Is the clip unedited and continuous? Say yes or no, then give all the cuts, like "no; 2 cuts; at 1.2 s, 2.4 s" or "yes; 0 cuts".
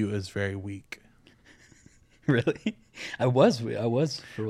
yes; 0 cuts